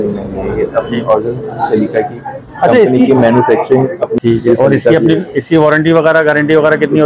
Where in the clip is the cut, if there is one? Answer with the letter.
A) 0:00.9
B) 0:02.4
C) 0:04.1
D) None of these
C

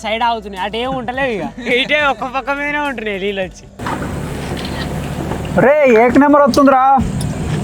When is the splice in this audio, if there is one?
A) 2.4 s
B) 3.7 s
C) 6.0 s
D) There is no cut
B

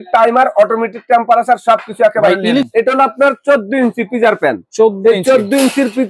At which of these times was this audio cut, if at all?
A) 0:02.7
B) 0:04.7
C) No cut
A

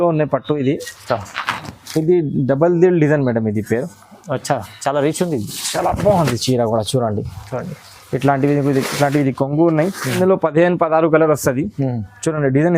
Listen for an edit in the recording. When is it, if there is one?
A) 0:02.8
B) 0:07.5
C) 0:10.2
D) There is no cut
C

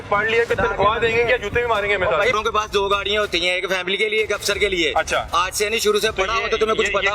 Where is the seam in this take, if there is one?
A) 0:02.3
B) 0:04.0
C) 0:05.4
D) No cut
A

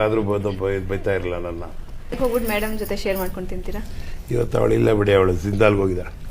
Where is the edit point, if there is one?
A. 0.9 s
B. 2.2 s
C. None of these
B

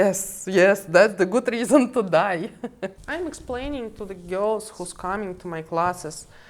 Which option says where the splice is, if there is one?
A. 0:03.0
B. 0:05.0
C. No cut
A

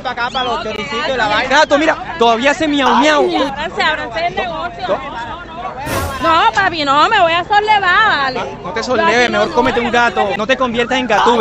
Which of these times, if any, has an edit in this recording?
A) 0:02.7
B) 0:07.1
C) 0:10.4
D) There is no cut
C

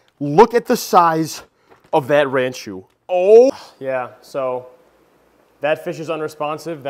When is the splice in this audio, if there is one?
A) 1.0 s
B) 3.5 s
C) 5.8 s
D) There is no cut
B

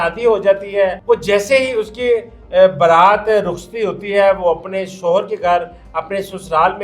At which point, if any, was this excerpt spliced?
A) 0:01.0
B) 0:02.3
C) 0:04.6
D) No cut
A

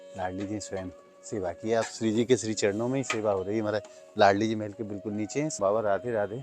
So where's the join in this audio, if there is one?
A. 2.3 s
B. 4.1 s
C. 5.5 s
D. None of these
C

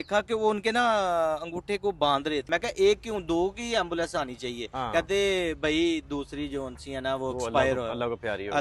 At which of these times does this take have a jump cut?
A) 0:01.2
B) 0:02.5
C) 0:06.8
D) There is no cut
B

